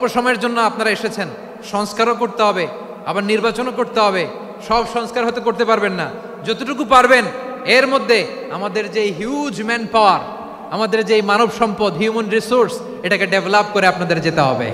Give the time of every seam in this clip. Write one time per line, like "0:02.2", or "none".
none